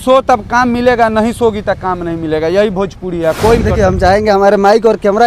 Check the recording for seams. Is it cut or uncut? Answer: cut